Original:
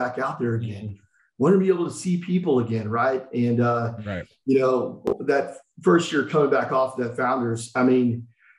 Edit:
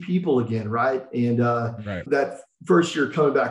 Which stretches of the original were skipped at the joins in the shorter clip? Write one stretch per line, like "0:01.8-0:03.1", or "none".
0:04.2-0:05.2